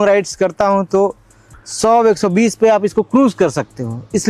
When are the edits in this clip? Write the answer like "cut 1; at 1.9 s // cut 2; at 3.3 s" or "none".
none